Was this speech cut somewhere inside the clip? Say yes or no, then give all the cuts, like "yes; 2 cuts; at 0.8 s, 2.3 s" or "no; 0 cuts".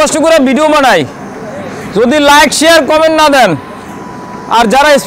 no; 0 cuts